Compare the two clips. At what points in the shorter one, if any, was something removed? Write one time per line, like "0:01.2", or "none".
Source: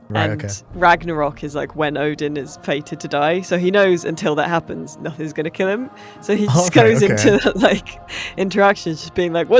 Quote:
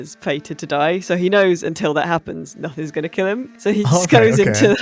0:03.5